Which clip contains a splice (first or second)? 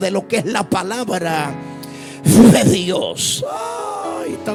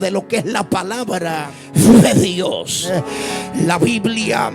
second